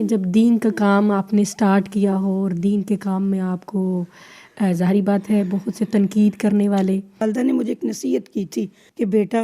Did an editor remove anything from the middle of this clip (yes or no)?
yes